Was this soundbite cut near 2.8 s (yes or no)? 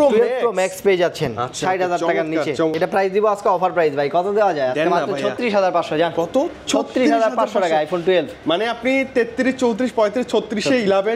yes